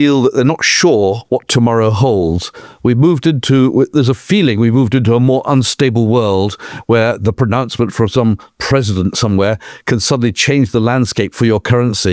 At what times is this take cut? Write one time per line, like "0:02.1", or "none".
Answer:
0:01.2